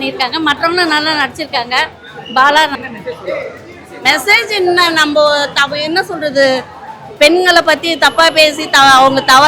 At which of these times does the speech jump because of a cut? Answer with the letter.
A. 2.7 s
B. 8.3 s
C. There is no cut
A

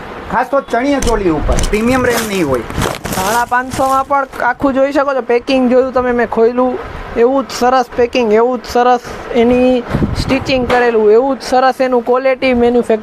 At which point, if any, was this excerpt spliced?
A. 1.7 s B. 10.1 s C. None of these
A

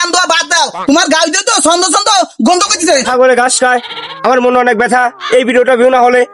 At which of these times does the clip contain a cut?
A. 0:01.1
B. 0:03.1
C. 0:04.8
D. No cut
B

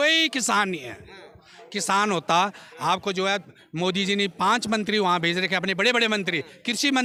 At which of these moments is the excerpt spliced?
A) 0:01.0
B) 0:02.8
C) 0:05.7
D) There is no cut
D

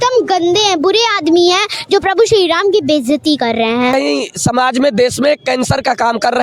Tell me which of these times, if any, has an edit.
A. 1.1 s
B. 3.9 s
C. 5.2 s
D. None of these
B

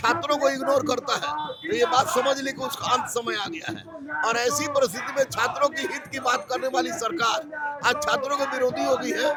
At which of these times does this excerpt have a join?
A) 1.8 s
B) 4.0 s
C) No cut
C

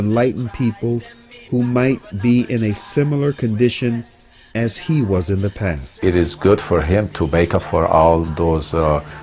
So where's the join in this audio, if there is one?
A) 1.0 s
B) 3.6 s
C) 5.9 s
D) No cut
C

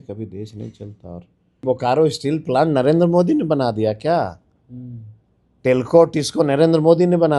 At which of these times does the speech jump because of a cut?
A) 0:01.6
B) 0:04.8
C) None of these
A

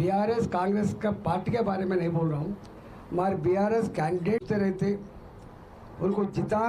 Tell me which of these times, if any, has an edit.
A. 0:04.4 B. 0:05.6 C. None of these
A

